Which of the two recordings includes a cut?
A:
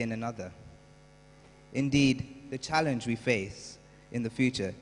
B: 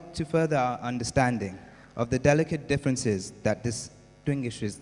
B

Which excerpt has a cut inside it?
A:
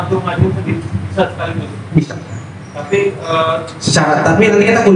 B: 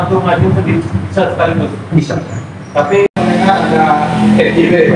B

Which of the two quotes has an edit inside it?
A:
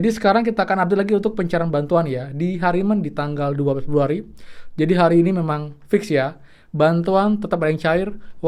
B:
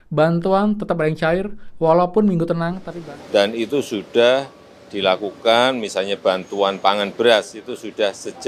B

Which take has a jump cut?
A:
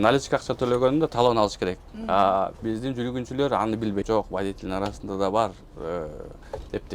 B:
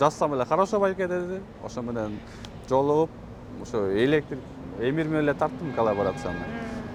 A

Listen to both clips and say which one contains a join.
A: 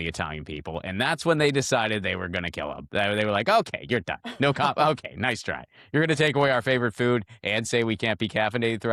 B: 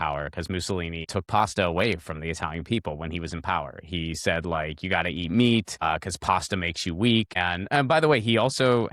B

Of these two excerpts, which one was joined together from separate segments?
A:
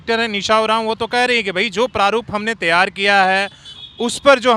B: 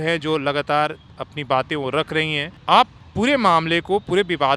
B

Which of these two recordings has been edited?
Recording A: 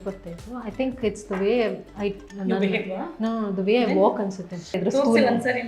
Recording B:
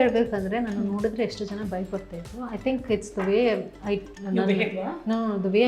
A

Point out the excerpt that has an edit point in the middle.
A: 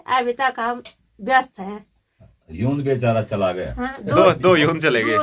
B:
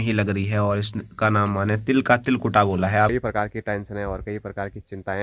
B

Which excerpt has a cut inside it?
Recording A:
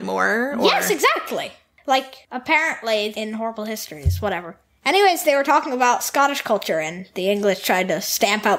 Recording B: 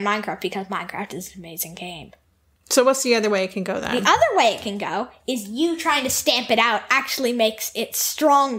A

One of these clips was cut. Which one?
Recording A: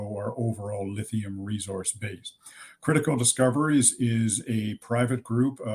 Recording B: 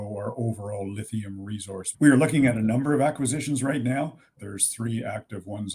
B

